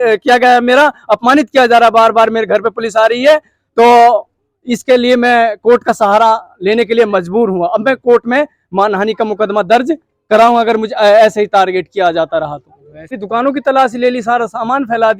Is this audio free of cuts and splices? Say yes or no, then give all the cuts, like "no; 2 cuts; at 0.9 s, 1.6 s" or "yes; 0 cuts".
no; 1 cut; at 13.2 s